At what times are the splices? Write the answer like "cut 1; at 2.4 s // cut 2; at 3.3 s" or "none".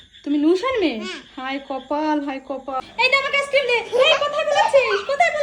cut 1; at 2.8 s